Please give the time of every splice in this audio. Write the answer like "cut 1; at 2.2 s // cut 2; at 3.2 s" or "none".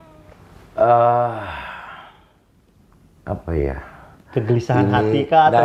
none